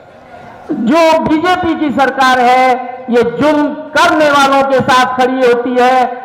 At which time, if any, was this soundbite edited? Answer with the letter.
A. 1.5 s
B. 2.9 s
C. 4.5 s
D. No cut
D